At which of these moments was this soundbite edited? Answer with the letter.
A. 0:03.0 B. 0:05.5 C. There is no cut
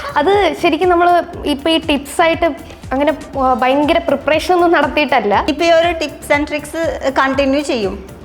B